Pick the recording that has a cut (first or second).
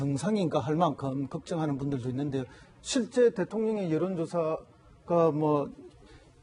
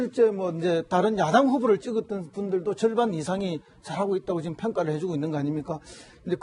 second